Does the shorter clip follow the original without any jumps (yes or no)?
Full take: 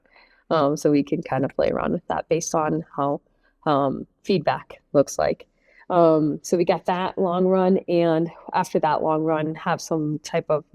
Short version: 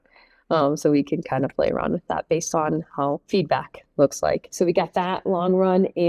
no